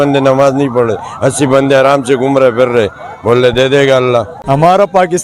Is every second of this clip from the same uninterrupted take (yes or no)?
no